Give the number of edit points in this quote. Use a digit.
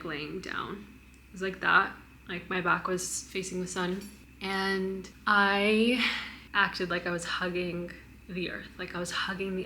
1